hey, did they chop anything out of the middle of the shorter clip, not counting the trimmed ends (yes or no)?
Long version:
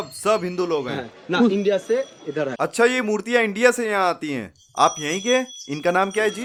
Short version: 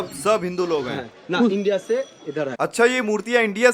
no